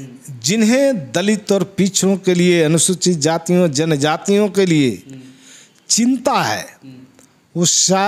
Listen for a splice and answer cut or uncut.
uncut